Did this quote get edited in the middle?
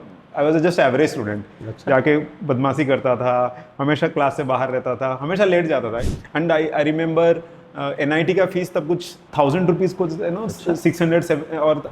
yes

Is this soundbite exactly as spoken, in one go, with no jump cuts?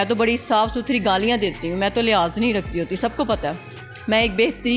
yes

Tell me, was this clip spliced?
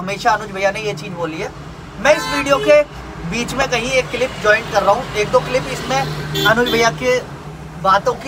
no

